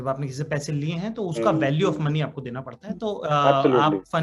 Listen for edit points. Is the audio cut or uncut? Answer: uncut